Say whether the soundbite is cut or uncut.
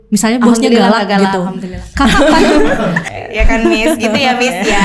cut